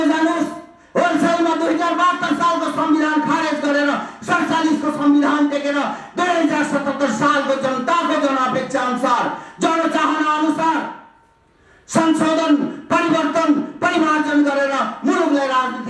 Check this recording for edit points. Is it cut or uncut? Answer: uncut